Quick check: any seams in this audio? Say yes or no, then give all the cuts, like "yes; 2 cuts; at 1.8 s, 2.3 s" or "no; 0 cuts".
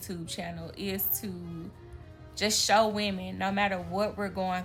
no; 0 cuts